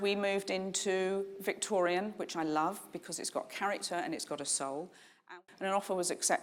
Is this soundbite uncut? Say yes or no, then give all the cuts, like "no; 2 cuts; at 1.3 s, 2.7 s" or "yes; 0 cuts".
no; 1 cut; at 5.3 s